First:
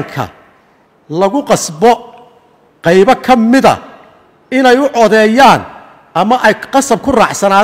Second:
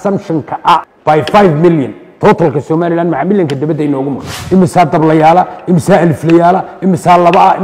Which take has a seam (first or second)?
second